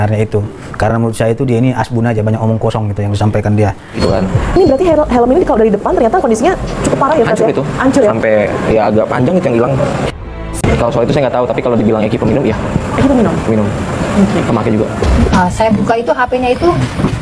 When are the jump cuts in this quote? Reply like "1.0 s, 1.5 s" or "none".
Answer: 4.0 s, 15.3 s

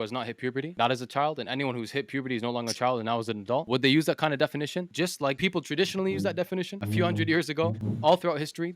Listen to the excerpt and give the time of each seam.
3.7 s, 5.4 s, 6.8 s, 7.8 s

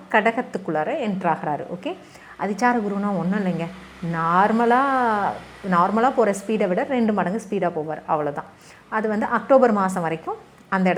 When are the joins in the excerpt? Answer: none

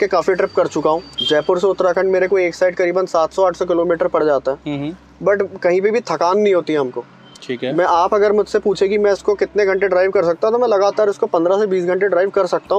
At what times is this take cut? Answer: 1.2 s

